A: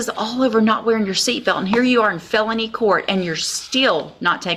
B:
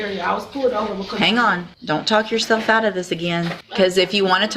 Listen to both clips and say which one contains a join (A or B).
B